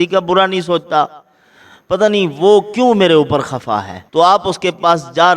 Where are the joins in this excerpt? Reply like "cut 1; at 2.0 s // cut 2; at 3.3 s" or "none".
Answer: cut 1; at 4.0 s